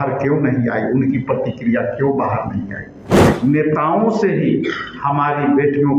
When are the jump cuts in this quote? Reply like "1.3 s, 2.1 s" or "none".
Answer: 3.3 s